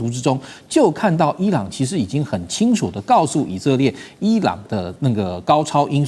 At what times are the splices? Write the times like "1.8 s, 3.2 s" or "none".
none